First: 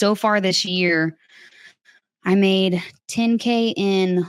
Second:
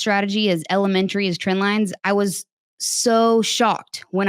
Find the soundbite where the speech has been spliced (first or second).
second